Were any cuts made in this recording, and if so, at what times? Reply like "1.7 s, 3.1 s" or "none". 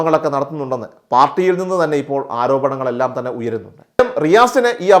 4.0 s